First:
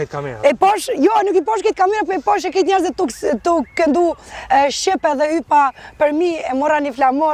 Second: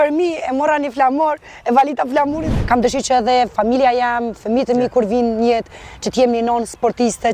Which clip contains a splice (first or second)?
second